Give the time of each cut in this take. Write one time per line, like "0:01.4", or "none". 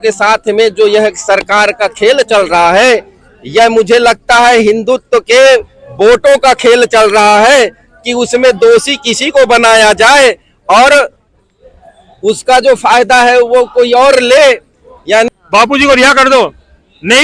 0:15.3